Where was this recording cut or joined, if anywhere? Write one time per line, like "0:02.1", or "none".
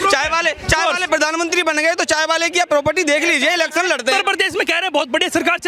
0:04.2